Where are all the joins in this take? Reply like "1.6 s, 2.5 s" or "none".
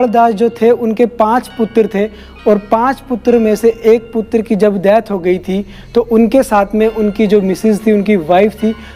none